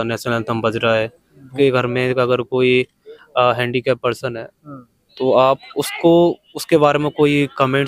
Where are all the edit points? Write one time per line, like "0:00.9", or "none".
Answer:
0:01.5